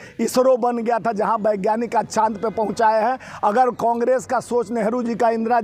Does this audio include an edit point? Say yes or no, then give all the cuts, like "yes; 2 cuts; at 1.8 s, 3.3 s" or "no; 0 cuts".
no; 0 cuts